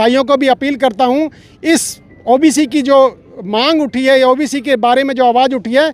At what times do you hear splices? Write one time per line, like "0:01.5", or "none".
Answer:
none